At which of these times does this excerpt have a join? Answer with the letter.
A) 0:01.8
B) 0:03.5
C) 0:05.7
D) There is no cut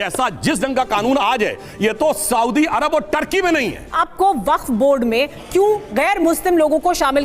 B